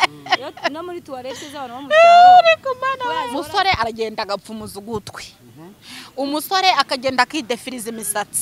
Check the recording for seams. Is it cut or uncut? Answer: cut